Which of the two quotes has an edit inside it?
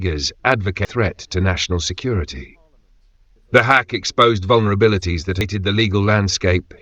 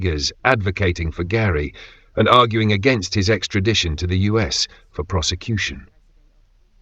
first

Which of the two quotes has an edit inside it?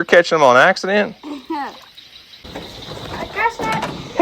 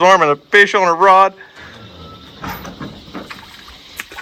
first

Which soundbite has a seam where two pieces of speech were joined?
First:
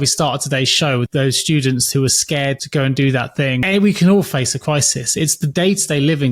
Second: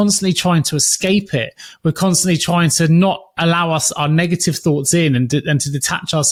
first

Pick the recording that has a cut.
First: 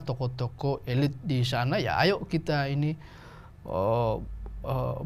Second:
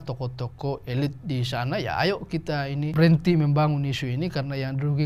second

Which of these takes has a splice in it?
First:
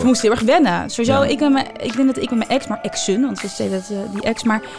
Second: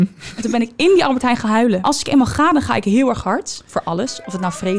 second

